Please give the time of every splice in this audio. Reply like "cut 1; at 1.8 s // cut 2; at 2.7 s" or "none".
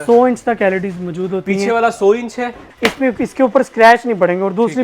cut 1; at 2.6 s